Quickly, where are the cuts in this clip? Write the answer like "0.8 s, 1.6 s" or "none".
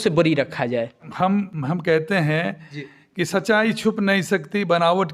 1.0 s